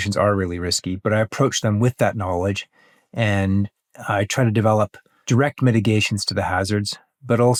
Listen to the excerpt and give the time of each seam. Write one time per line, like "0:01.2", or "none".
none